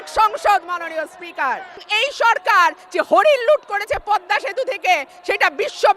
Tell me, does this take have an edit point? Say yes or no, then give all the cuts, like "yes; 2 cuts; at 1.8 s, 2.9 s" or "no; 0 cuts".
yes; 1 cut; at 1.9 s